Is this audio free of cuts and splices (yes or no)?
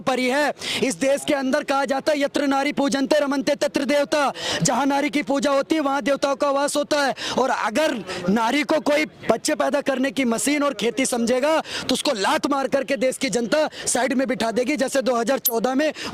yes